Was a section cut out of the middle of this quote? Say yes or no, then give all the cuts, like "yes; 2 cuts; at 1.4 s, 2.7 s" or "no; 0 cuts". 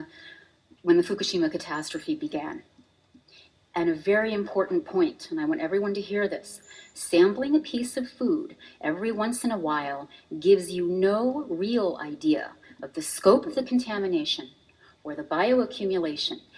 no; 0 cuts